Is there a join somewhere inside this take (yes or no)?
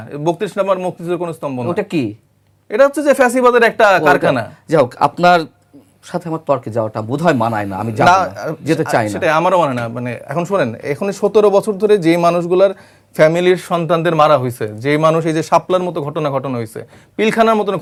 no